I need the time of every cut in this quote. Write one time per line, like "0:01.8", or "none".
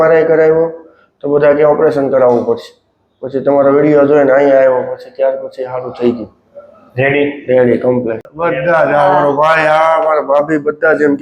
0:08.2

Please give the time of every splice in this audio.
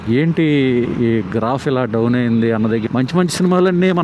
0:02.8

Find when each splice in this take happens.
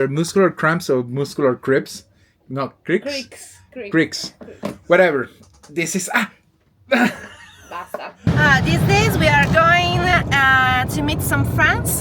0:08.3

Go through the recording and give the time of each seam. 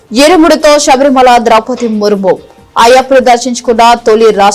none

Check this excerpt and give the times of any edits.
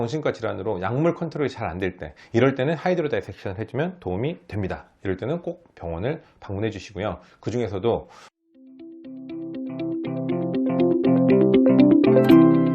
0:08.2

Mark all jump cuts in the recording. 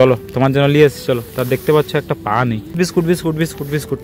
0:02.9

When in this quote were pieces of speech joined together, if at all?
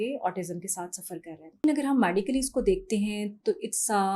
0:01.6

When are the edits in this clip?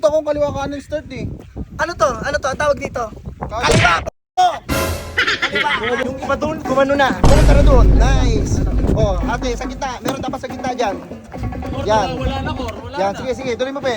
0:06.0

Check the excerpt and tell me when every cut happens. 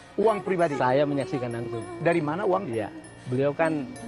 none

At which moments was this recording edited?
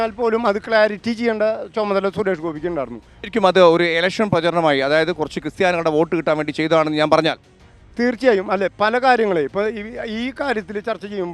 0:03.1

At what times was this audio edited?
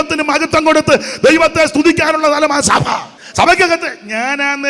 0:03.2

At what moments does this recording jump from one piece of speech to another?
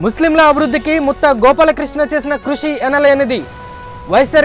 none

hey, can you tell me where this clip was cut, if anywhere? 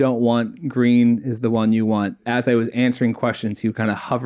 0:02.2

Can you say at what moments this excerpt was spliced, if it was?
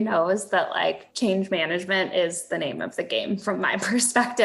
none

